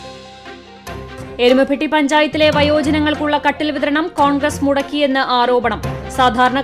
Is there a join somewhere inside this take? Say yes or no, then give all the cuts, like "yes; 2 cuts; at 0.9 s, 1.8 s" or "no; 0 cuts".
yes; 1 cut; at 1.4 s